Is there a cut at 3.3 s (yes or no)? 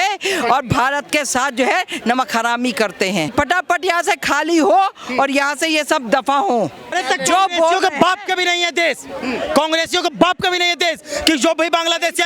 yes